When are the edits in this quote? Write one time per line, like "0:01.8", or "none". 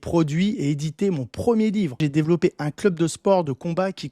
0:02.0